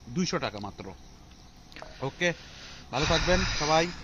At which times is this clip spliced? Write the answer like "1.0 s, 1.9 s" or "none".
none